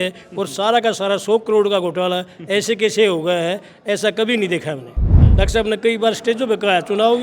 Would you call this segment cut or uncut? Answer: cut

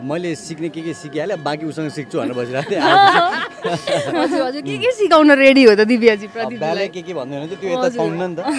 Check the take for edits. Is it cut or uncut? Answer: uncut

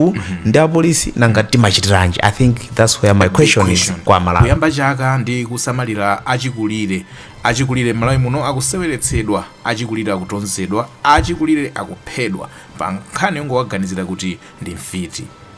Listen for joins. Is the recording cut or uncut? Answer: cut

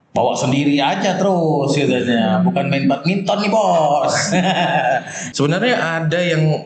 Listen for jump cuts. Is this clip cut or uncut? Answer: cut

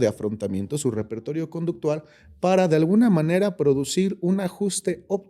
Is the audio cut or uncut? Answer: uncut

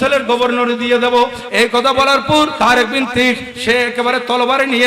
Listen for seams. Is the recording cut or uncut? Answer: cut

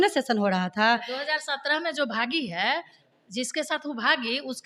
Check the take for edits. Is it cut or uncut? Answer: uncut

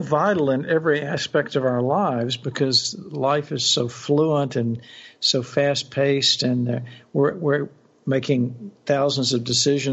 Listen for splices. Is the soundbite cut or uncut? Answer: uncut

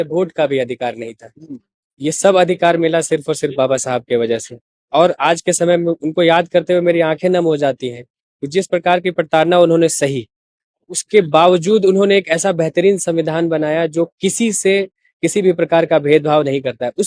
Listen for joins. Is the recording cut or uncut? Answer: uncut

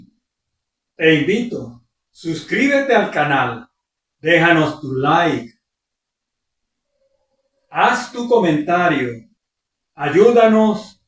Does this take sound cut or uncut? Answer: uncut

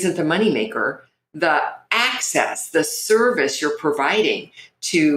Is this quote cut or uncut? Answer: uncut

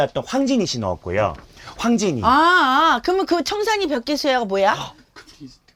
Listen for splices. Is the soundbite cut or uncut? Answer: uncut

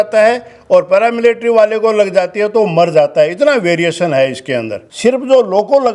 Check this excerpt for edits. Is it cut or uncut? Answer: cut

